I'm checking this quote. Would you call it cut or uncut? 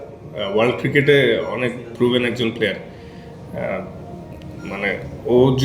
uncut